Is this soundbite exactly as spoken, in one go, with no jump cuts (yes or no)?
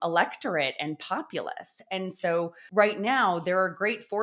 no